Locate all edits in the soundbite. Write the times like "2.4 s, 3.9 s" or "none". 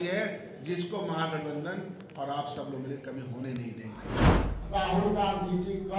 4.4 s